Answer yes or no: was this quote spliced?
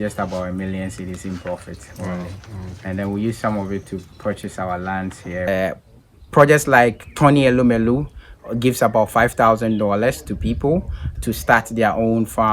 yes